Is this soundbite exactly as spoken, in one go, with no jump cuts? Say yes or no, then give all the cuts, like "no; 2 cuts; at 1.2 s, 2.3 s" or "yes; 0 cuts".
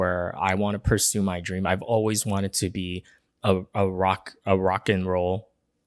yes; 0 cuts